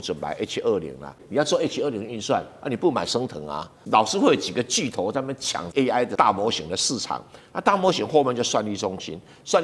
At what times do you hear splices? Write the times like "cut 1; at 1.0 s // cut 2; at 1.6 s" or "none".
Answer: cut 1; at 1.2 s // cut 2; at 3.8 s // cut 3; at 6.1 s